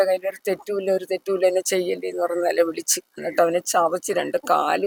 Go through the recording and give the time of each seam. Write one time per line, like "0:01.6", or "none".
none